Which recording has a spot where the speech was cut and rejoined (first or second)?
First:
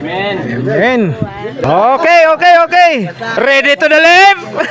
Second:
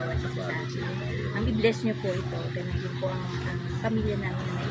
first